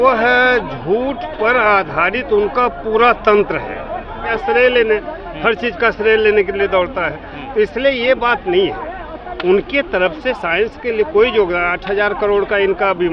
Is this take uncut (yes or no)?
no